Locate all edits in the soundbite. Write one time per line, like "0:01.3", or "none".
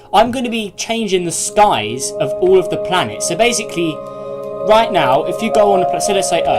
0:02.3